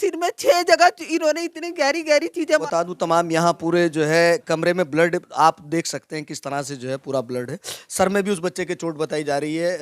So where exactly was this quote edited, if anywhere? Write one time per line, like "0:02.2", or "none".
0:02.6